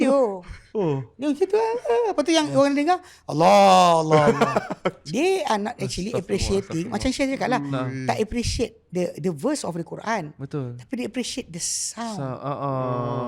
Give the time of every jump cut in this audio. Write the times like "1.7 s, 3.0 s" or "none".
none